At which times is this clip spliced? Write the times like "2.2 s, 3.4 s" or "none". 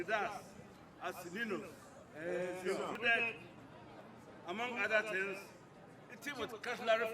3.0 s